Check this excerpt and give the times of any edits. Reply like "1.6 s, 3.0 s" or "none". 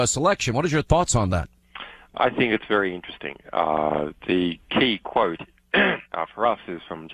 6.2 s